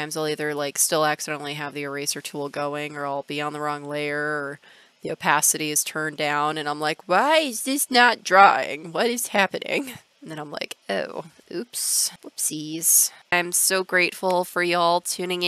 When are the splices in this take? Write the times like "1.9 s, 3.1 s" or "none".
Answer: none